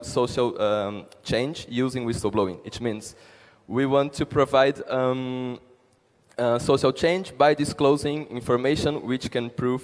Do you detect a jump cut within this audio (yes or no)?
no